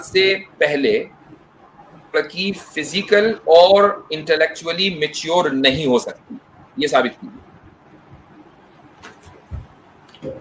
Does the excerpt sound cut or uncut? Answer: uncut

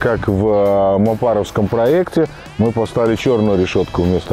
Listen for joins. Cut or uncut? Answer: uncut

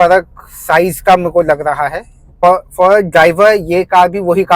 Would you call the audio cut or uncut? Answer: cut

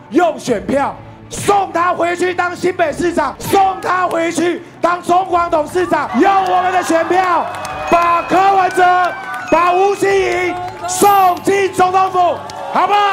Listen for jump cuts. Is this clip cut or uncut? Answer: cut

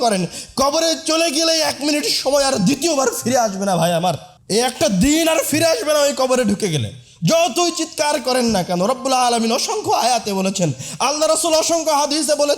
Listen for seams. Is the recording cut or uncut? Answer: cut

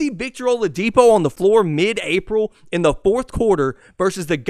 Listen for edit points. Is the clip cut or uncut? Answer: cut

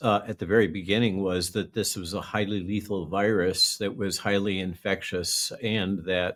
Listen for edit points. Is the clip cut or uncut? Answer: uncut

